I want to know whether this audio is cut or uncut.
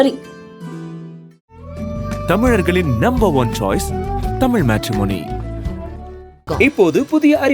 uncut